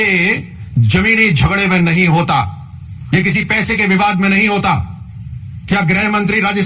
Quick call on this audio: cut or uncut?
uncut